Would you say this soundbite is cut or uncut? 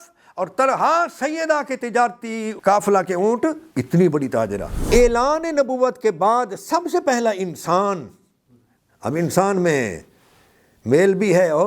cut